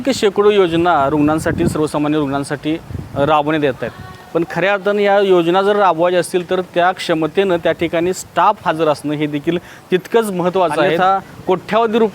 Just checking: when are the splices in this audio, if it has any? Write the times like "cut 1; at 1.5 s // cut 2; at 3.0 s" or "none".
cut 1; at 11.0 s